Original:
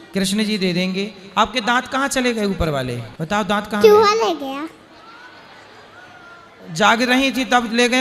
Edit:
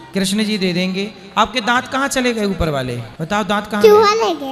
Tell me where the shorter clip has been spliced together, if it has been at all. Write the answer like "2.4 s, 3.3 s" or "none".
none